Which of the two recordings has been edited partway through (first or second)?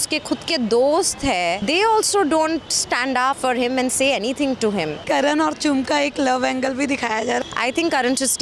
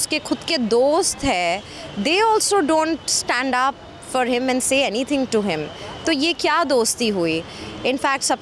first